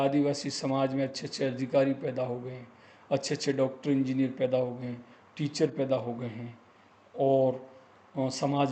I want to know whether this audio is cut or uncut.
uncut